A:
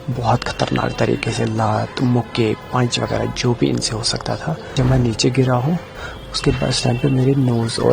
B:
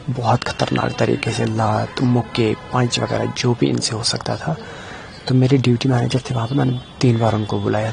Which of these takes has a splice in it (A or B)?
A